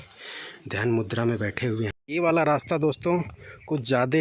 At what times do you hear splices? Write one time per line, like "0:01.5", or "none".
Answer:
0:01.9